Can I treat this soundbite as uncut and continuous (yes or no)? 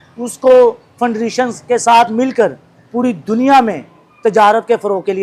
yes